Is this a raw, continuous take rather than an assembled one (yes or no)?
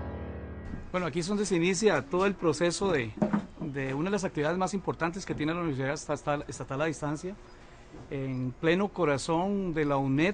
yes